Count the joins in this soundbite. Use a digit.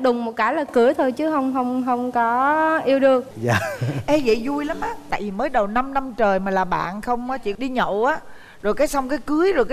1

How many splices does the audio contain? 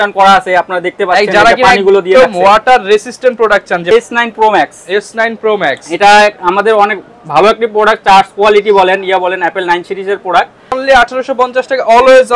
2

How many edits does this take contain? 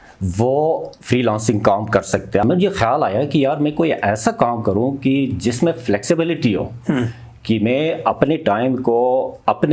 1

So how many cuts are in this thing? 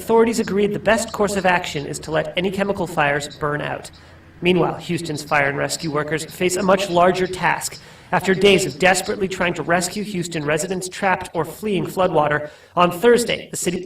1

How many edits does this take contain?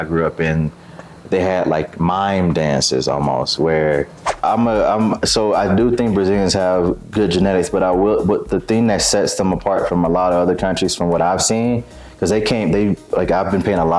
1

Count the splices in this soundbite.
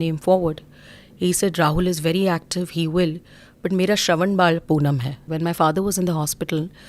1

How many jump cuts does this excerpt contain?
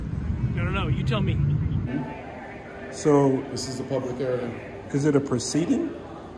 1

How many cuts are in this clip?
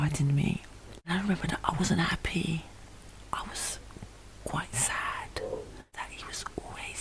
2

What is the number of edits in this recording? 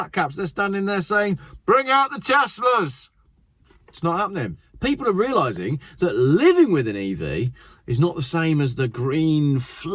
1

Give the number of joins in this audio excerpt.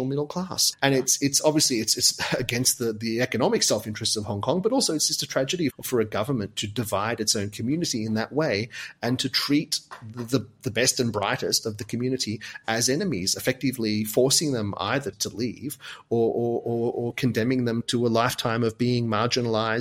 3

